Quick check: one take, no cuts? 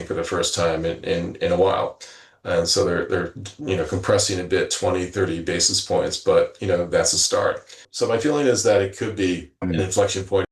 no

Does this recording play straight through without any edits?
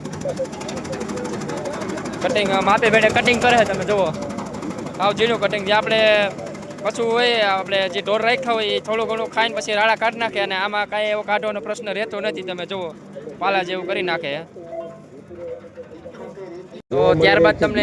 yes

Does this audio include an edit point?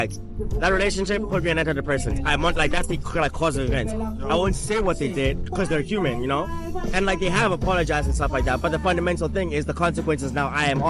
no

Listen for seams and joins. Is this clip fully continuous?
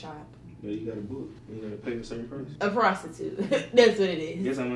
no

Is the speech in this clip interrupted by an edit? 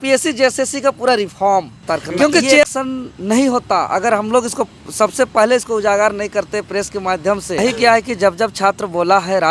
yes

